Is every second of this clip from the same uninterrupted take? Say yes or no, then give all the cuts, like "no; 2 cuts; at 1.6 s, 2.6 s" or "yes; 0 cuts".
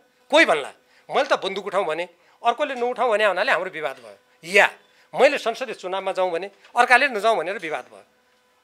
yes; 0 cuts